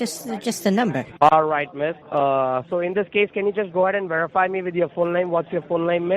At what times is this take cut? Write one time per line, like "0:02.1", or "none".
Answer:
0:01.0